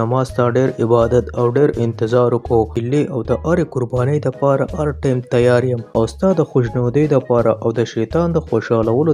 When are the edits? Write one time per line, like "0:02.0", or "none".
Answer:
0:02.7
0:05.8